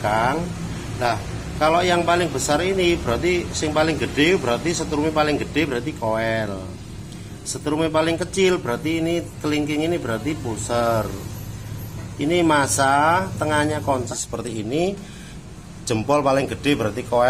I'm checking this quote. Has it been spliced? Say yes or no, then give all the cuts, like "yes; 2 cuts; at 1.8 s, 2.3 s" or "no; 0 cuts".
yes; 1 cut; at 14.1 s